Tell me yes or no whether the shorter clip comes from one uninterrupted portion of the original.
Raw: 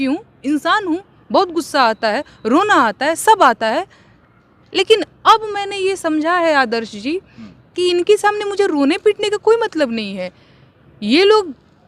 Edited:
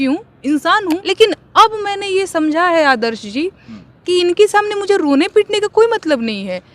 no